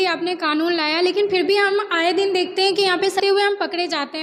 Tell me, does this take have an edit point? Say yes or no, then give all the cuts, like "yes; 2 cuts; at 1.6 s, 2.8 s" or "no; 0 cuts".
yes; 1 cut; at 3.2 s